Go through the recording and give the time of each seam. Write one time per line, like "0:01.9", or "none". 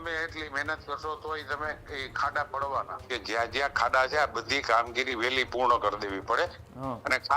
0:03.1